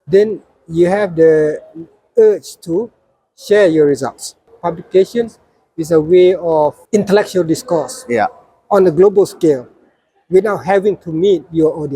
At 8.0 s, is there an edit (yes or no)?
no